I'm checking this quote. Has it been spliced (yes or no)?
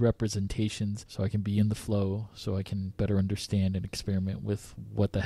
yes